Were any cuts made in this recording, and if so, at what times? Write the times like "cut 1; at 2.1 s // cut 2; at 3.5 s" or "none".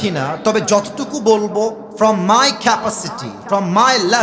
cut 1; at 1.8 s